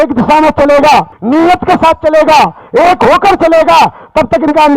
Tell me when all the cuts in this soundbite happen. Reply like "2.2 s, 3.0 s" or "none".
1.2 s